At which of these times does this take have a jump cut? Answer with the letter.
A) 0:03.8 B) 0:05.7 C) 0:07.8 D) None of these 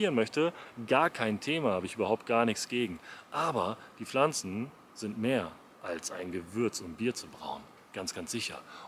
D